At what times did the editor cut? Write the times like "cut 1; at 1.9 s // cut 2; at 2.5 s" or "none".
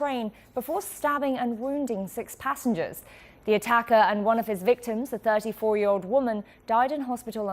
cut 1; at 6.4 s